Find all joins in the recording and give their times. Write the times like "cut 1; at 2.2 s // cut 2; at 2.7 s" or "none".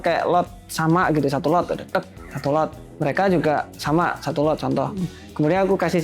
cut 1; at 2.8 s